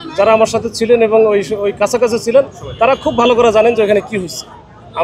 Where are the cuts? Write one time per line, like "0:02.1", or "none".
none